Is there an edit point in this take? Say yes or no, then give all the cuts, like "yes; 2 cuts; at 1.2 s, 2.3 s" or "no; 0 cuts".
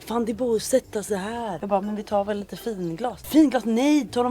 yes; 2 cuts; at 1.6 s, 3.2 s